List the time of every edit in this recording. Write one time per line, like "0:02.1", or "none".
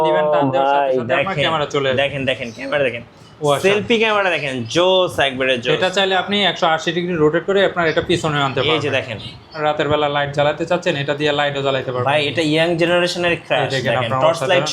0:09.6